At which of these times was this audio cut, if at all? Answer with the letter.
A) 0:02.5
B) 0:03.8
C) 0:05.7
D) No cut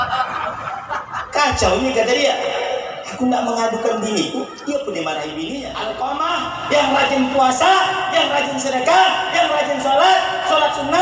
C